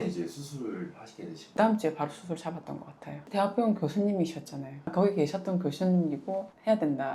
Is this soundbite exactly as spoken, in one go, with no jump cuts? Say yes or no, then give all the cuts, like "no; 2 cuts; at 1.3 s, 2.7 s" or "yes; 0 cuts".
no; 3 cuts; at 1.5 s, 3.2 s, 4.9 s